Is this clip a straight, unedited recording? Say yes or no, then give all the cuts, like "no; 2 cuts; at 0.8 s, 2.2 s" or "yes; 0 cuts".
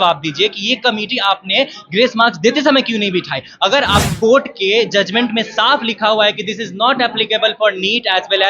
no; 1 cut; at 4.0 s